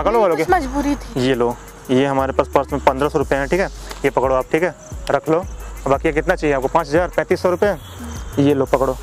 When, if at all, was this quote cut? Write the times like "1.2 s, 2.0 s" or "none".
1.1 s